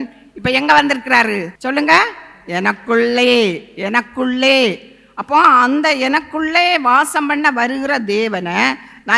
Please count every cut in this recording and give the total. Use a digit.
1